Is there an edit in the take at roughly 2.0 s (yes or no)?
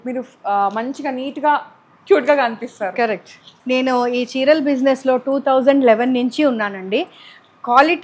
no